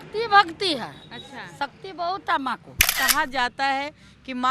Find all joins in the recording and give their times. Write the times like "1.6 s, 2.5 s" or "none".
2.9 s